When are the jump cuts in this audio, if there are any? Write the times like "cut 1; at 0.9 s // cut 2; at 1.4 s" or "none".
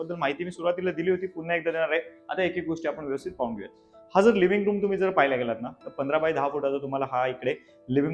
none